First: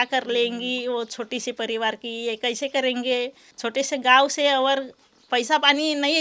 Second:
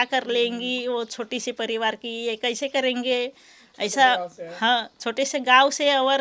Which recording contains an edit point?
first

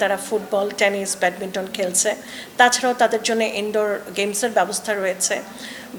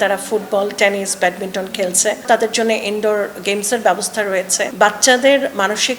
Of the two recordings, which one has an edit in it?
second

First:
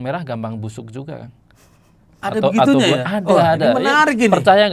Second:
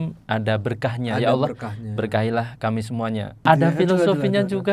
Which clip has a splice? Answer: second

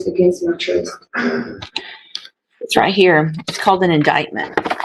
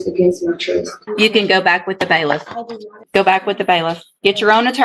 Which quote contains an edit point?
second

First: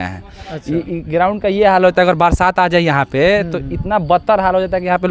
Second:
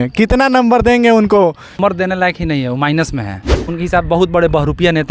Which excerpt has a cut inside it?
second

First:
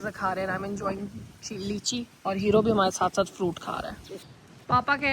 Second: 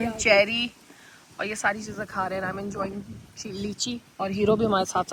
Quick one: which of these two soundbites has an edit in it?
first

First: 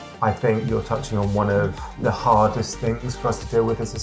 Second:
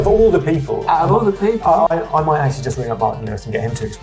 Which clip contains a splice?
first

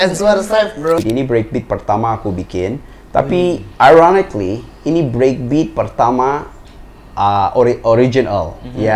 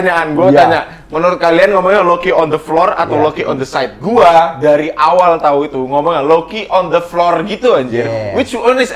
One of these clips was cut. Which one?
first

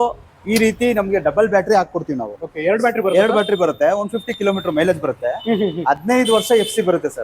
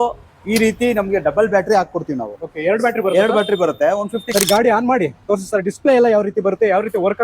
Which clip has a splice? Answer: second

